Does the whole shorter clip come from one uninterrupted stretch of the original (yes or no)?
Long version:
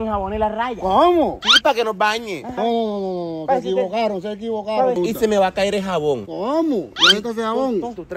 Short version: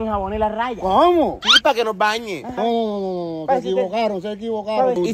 yes